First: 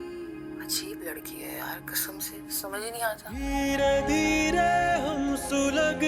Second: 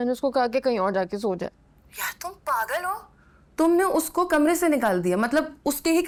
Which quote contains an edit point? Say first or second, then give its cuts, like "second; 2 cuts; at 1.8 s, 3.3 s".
first; 1 cut; at 3.4 s